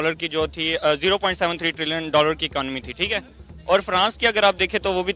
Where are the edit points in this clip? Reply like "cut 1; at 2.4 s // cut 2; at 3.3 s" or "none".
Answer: none